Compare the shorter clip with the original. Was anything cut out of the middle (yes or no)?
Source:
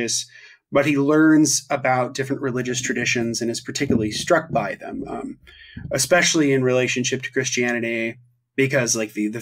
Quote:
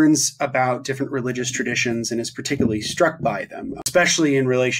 yes